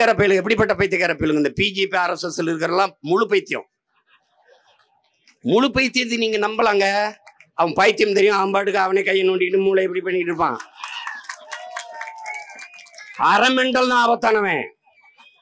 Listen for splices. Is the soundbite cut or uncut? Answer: uncut